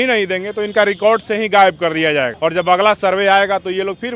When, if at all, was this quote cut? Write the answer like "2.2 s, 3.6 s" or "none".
2.3 s